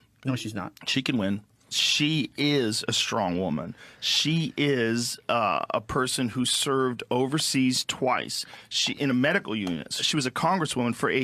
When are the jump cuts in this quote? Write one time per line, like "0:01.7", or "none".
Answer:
0:01.5